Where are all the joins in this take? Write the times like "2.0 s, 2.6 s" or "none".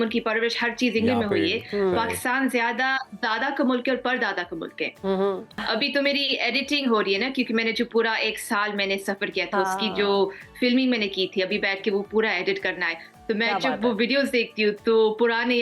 5.5 s